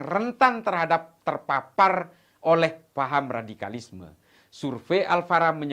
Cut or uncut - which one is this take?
uncut